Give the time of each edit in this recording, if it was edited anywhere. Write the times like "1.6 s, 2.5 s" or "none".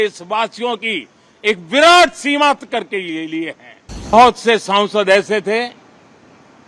4.1 s